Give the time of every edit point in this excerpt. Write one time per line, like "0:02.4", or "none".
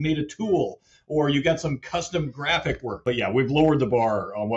0:03.0